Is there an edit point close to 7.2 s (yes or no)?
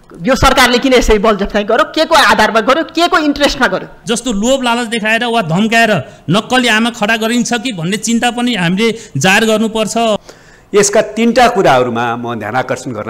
no